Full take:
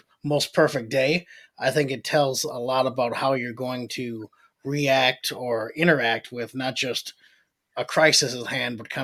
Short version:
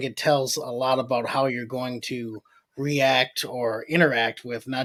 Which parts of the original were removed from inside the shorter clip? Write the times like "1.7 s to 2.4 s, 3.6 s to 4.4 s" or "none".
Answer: none